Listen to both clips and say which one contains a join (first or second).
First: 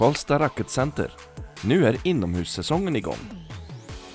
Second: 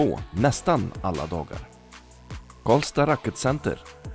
first